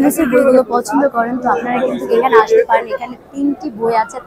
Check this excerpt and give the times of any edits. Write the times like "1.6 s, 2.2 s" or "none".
none